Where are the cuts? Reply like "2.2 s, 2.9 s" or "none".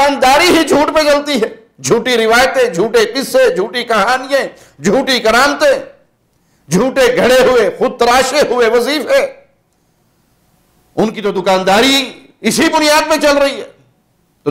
none